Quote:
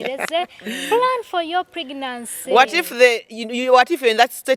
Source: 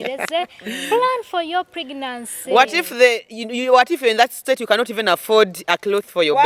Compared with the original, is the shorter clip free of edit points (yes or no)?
yes